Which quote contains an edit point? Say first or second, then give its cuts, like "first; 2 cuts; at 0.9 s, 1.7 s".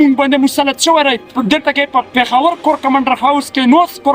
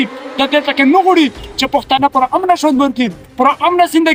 first; 2 cuts; at 1.2 s, 2.1 s